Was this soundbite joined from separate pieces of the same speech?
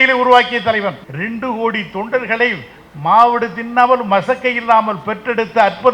yes; 1 cut; at 1.1 s

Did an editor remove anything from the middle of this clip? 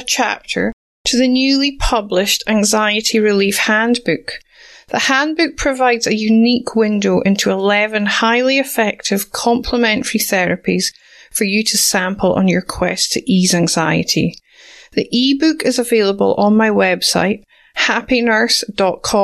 no; 0 cuts

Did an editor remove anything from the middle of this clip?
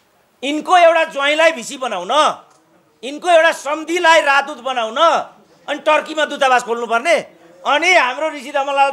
no; 0 cuts

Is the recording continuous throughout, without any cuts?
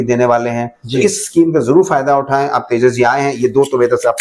yes; 0 cuts

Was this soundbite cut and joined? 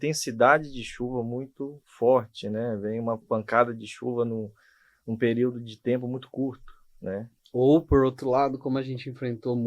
no; 0 cuts

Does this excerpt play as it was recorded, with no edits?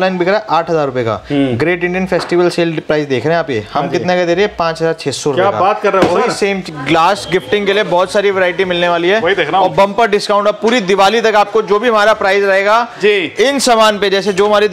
no; 1 cut; at 6.6 s

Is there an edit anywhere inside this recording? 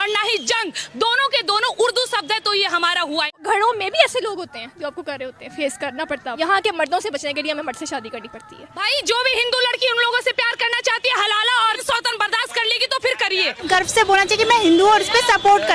yes; 5 cuts; at 3.3 s, 6.4 s, 8.8 s, 11.8 s, 13.6 s

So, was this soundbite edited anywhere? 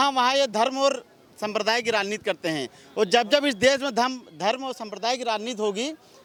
no; 0 cuts

